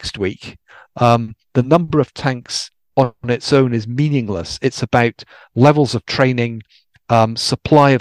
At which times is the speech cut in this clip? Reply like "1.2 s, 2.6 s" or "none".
none